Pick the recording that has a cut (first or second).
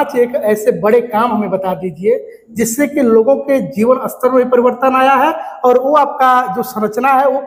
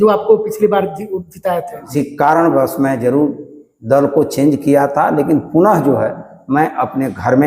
second